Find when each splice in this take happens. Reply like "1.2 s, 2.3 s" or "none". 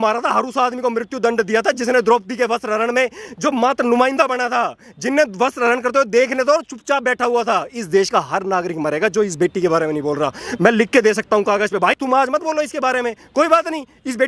none

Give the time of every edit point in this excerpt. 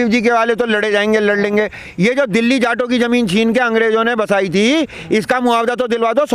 none

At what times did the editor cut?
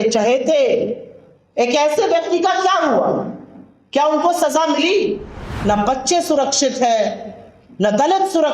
5.5 s

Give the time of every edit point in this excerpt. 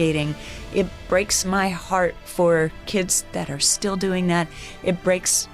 none

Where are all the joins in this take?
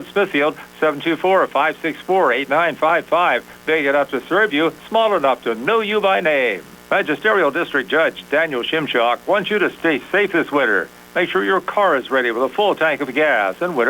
6.7 s

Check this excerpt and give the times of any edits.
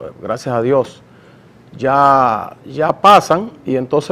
2.3 s

